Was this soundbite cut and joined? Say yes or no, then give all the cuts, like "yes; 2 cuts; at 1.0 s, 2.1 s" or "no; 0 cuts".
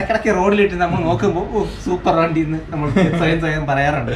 no; 0 cuts